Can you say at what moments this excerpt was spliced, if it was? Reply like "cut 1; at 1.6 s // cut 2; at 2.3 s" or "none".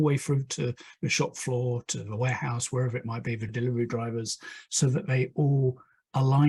none